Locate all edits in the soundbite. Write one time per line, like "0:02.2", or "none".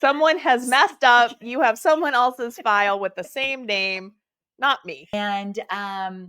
0:05.1